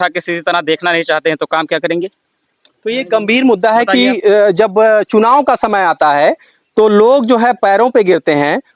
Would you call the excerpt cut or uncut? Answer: uncut